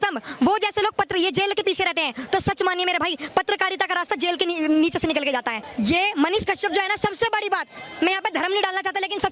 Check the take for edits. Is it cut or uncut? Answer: cut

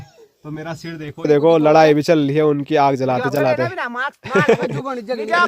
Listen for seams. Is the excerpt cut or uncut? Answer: cut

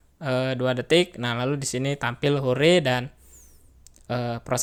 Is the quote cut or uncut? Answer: uncut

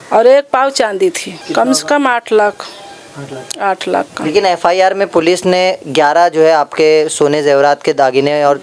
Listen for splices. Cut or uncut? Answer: cut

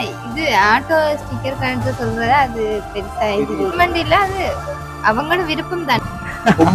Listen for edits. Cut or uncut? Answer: cut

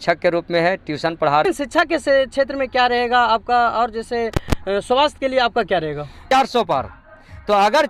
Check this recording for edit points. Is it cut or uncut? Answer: cut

